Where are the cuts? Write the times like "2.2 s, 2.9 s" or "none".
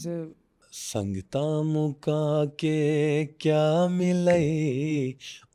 none